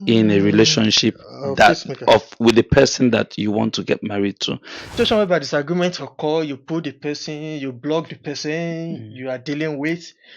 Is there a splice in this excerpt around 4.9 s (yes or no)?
yes